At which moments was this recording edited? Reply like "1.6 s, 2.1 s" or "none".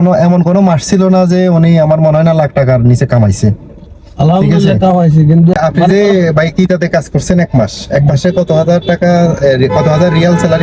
5.5 s